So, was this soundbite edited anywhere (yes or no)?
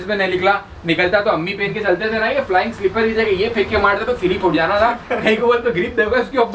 no